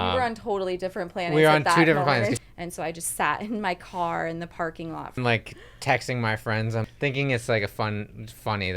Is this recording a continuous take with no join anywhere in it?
no; 3 cuts; at 2.3 s, 5.2 s, 6.9 s

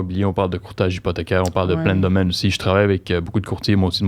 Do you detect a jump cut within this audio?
no; 0 cuts

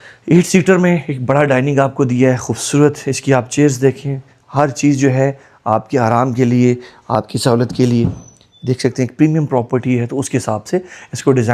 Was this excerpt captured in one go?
yes; 0 cuts

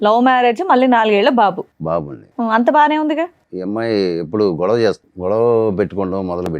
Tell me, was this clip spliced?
yes; 2 cuts; at 3.5 s, 5.1 s

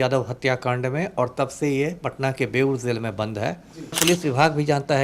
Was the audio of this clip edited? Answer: yes; 1 cut; at 4.0 s

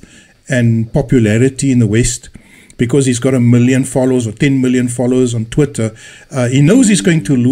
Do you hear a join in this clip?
yes; 1 cut; at 4.5 s

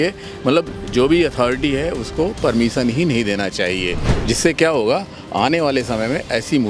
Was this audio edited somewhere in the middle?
yes; 1 cut; at 4.1 s

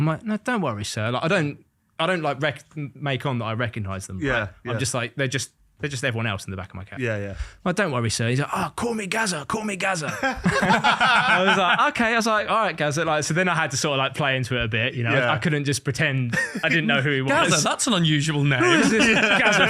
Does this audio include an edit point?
no; 0 cuts

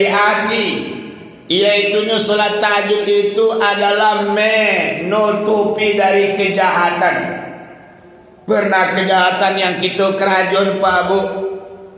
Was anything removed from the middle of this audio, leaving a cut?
no; 0 cuts

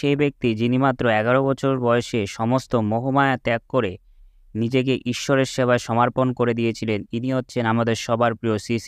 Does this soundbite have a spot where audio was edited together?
no; 0 cuts

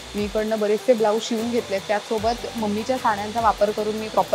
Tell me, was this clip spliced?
no; 0 cuts

